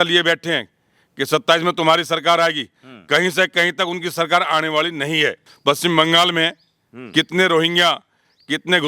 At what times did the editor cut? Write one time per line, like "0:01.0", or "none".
0:05.5